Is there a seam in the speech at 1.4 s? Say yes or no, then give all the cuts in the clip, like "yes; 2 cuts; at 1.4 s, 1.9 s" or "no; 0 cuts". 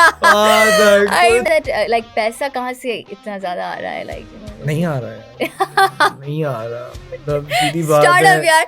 yes; 1 cut; at 1.4 s